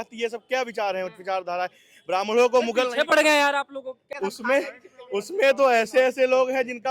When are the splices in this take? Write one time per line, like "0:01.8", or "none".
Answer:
0:04.1